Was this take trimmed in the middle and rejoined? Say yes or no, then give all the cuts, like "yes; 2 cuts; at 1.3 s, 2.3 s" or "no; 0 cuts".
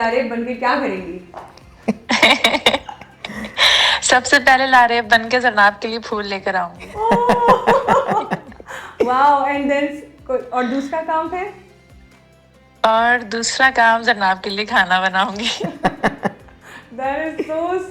no; 0 cuts